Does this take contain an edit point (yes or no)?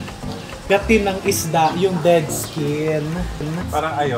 no